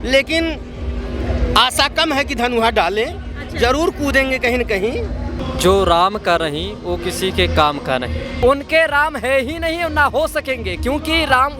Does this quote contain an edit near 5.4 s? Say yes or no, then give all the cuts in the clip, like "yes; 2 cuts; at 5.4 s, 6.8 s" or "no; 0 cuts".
yes; 2 cuts; at 5.4 s, 8.3 s